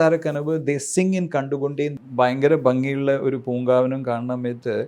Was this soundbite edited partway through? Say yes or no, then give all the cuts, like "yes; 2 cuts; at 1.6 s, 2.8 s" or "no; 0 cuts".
yes; 1 cut; at 1.9 s